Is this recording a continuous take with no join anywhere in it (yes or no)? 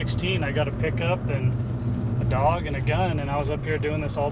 yes